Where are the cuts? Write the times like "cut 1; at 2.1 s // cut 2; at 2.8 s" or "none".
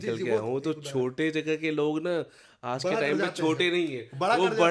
none